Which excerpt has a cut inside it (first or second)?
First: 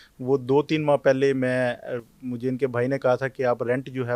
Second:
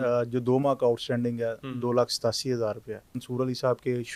second